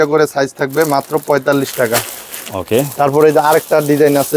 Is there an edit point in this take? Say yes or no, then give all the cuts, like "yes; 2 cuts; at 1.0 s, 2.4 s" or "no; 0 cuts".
no; 0 cuts